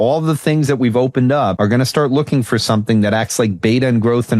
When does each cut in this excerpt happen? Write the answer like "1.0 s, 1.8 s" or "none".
1.5 s